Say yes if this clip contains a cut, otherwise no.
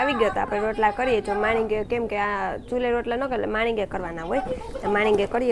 no